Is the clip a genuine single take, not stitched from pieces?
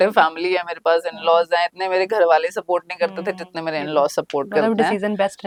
yes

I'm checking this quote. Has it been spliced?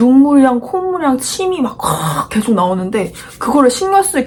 no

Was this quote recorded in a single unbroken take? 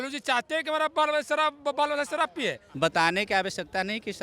no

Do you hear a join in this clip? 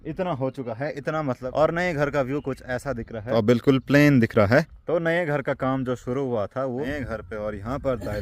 yes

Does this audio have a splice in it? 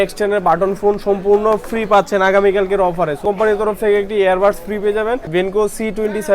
yes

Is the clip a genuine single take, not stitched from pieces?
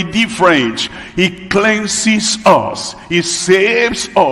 yes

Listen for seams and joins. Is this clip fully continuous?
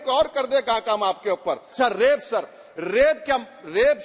no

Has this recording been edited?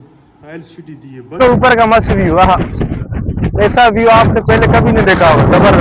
yes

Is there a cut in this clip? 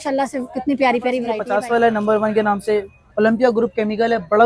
yes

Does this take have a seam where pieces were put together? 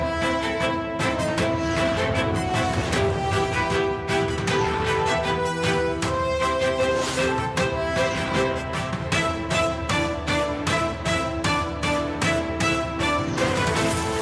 no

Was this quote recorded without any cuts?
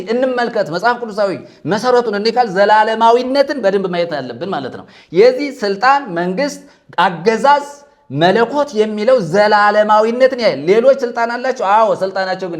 yes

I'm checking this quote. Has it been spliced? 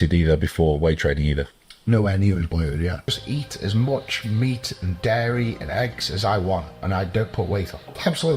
yes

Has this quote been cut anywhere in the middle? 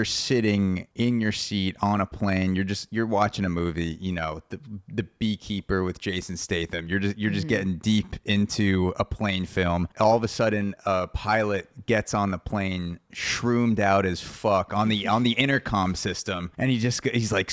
yes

